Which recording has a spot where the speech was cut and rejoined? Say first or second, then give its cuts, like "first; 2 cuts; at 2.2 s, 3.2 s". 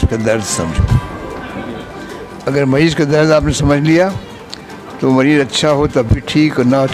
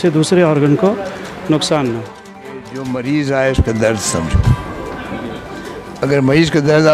second; 1 cut; at 2.7 s